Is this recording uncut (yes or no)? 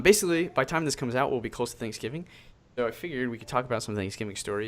no